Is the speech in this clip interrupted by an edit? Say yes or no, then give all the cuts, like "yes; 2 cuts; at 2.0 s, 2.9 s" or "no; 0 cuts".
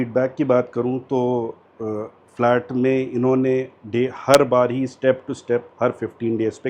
no; 0 cuts